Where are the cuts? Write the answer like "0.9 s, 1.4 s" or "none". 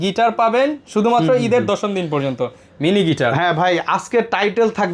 none

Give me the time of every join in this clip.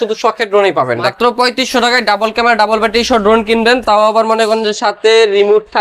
1.1 s

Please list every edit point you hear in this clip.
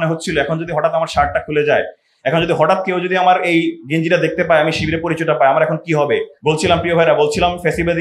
6.3 s

